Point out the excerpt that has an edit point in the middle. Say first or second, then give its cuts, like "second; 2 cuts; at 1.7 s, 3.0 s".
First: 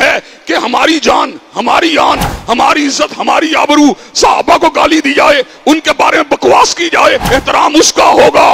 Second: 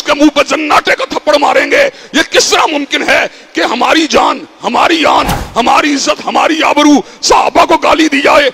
first; 1 cut; at 7.2 s